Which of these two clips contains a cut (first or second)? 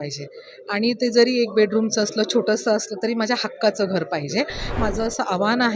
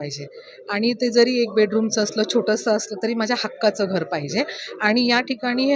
first